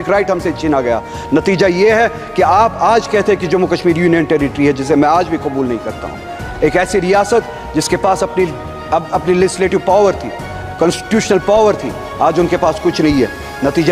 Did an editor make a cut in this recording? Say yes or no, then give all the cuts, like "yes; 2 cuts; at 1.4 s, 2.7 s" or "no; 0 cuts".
no; 0 cuts